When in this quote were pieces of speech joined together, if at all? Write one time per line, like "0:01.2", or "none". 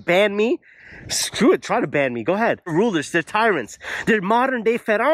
0:02.7